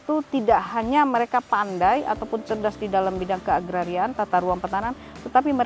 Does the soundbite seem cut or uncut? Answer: uncut